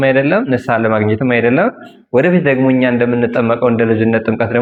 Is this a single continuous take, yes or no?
yes